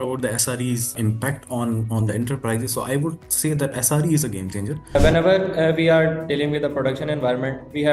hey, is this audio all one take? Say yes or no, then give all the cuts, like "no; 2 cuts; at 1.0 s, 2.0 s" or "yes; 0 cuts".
no; 2 cuts; at 0.9 s, 4.9 s